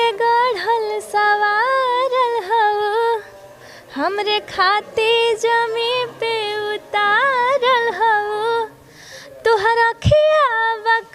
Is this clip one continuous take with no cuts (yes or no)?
yes